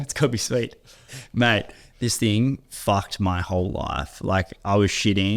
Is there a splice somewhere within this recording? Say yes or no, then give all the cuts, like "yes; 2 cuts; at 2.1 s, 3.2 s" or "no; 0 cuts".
no; 0 cuts